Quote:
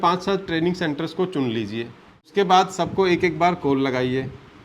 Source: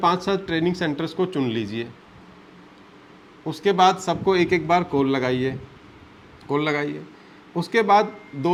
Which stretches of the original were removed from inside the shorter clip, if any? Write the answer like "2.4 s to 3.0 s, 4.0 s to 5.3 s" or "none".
2.3 s to 3.6 s

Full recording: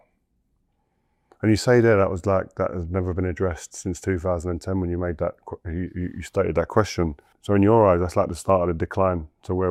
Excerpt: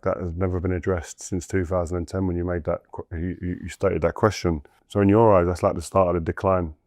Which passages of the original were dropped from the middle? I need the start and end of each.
none

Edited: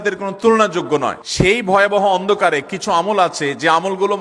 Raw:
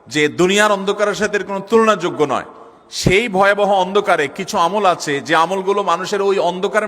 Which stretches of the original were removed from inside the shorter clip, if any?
2.5 s to 2.8 s

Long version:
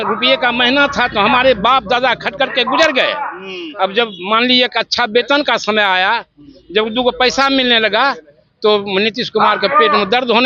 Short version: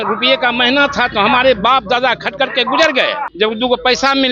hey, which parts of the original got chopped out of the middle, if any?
3.3 s to 6.6 s

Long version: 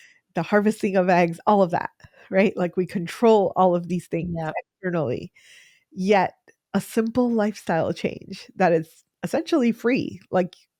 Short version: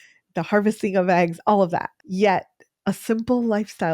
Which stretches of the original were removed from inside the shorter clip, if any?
2.0 s to 5.9 s

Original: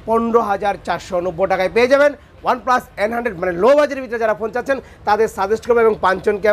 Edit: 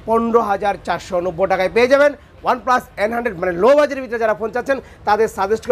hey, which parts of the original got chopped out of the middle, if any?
none

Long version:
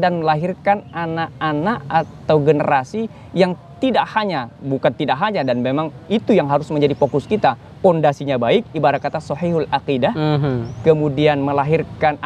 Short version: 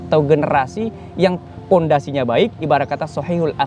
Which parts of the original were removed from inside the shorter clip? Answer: 3.7 s to 7.6 s

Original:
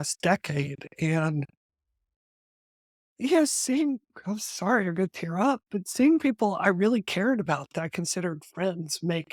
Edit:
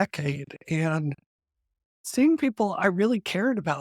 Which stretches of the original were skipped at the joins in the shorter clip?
2.3 s to 5.8 s

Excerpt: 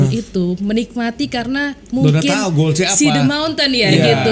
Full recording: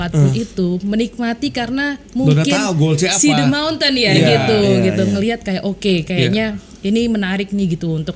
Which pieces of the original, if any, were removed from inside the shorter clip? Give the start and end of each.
none

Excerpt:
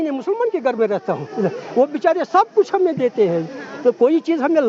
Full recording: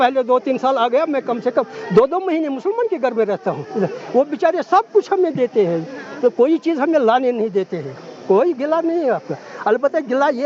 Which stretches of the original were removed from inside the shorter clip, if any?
none

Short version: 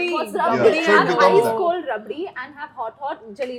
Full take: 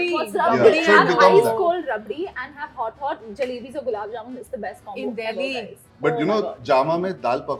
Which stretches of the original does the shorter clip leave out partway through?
none

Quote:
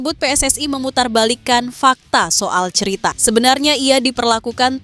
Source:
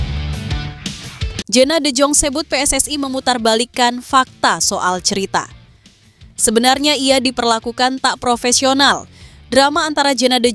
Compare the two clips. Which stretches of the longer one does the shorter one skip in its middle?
5.5 s to 6.4 s

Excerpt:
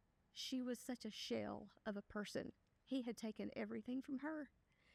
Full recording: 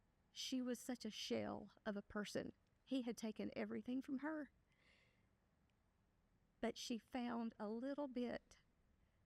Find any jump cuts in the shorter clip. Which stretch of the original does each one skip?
none

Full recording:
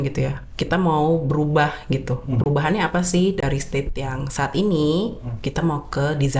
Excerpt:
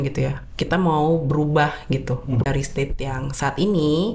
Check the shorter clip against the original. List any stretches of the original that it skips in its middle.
2.4 s to 3.4 s

